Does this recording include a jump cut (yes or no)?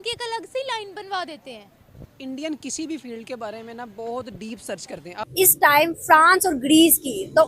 yes